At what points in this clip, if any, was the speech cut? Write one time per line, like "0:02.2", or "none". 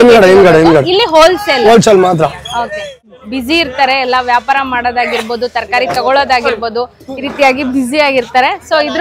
0:03.0